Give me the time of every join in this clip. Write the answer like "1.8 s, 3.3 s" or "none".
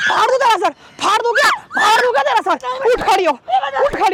none